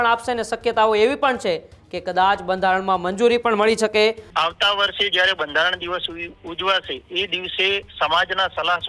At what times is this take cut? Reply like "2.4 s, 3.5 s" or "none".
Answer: 4.3 s